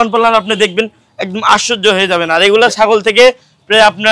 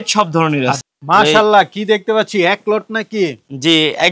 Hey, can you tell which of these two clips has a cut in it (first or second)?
second